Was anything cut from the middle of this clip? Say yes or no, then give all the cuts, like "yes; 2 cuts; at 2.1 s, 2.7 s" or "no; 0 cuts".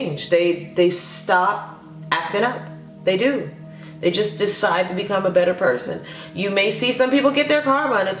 no; 0 cuts